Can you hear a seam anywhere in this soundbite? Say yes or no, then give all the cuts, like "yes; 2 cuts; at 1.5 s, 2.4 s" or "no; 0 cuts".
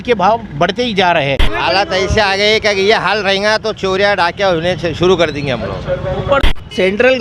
yes; 2 cuts; at 1.5 s, 6.4 s